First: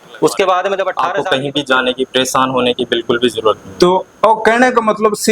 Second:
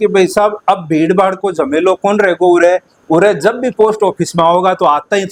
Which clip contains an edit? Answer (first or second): first